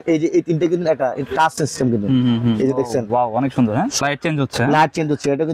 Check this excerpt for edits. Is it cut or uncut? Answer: cut